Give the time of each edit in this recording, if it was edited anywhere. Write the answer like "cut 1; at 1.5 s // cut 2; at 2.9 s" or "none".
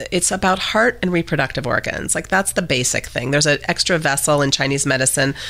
none